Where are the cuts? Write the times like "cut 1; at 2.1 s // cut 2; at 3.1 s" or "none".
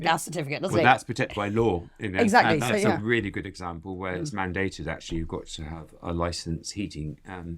none